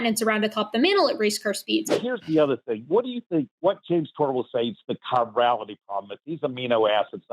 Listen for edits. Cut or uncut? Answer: cut